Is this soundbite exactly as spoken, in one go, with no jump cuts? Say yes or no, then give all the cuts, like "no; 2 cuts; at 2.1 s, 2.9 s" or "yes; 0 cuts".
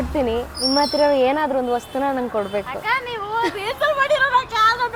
yes; 0 cuts